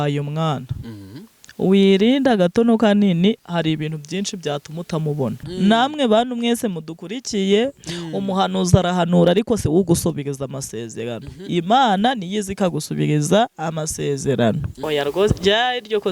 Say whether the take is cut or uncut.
cut